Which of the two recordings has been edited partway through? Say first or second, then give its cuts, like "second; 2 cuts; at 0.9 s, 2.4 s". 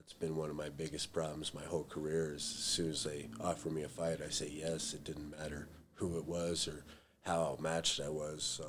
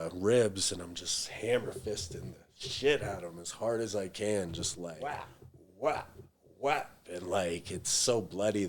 second; 1 cut; at 4.9 s